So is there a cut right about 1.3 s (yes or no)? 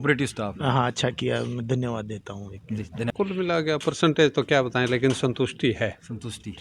no